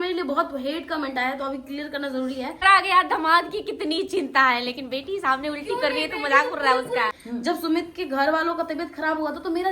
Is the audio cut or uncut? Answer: cut